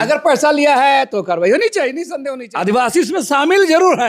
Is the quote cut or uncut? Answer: cut